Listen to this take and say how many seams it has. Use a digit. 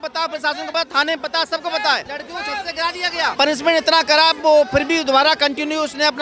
2